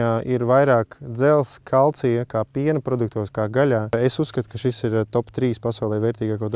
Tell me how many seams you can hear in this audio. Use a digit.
1